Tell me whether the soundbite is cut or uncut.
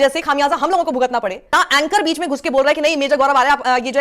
cut